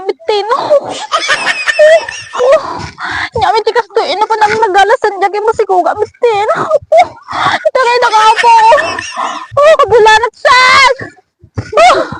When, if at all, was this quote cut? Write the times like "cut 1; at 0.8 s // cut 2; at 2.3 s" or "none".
cut 1; at 2.2 s

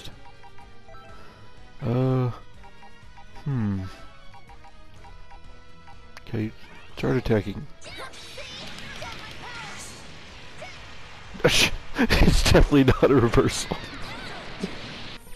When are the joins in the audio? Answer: none

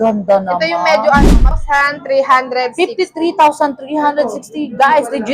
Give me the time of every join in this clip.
cut 1; at 1.6 s

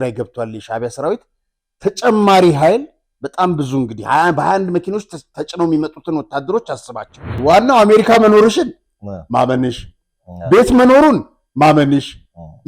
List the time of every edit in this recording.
cut 1; at 7.3 s

